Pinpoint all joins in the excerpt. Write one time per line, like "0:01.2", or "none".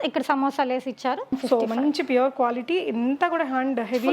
0:01.4